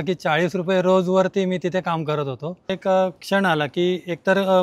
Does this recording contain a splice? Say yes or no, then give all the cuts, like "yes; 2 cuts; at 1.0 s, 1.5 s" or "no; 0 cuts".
yes; 1 cut; at 2.8 s